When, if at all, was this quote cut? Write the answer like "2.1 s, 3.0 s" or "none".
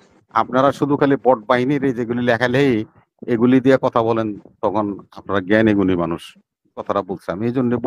6.9 s